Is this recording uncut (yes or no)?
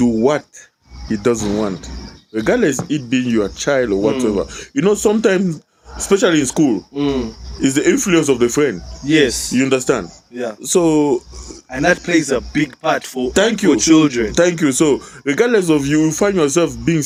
yes